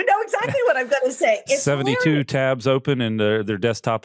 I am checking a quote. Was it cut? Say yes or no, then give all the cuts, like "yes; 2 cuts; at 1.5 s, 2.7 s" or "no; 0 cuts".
no; 0 cuts